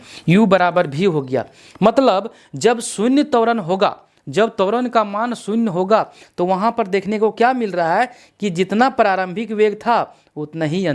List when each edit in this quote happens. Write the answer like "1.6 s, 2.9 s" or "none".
none